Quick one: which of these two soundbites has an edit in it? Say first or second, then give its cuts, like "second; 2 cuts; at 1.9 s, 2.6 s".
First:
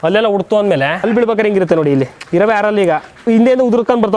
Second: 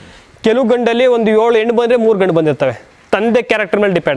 first; 3 cuts; at 1.0 s, 2.2 s, 3.2 s